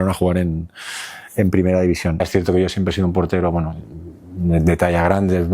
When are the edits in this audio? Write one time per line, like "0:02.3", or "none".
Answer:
0:02.2